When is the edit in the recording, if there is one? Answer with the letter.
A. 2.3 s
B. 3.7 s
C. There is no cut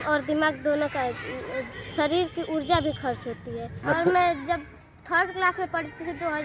B